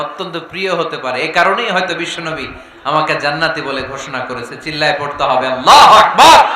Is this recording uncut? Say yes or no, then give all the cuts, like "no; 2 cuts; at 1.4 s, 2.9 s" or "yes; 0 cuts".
yes; 0 cuts